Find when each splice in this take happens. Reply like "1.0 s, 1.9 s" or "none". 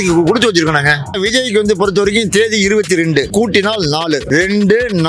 1.0 s, 3.3 s, 4.2 s